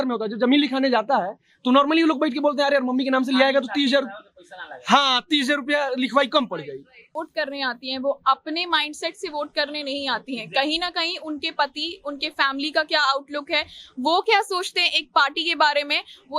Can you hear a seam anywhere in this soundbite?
yes; 1 cut; at 7.1 s

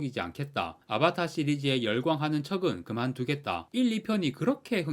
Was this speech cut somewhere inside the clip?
yes; 1 cut; at 3.7 s

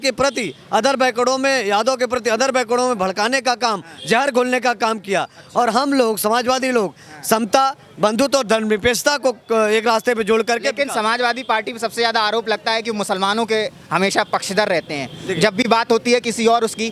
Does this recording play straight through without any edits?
yes; 0 cuts

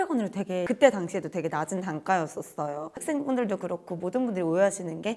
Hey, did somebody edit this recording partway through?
no; 0 cuts

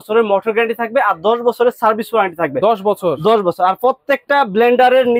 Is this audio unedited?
yes; 0 cuts

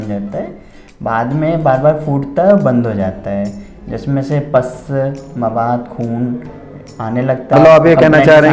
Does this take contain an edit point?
yes; 1 cut; at 7.5 s

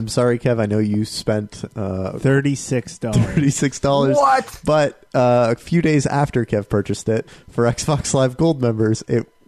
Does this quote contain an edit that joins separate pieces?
yes; 1 cut; at 7.4 s

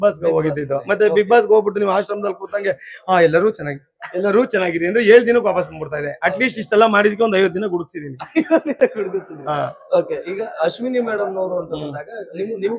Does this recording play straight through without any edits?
yes; 0 cuts

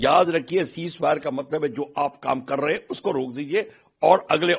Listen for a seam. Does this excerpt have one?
no; 0 cuts

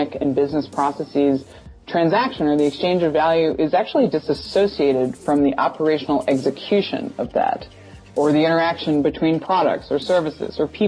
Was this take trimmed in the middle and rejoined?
no; 0 cuts

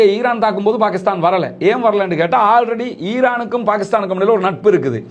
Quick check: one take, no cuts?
yes; 0 cuts

